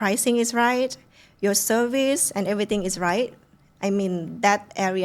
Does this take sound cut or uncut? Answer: uncut